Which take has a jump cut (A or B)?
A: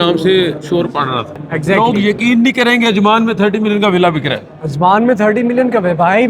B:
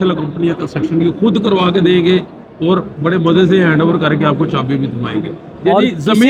A